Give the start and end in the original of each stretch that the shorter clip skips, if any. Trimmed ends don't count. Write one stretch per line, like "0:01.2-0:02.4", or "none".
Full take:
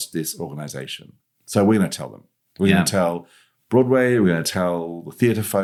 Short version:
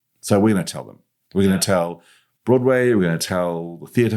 none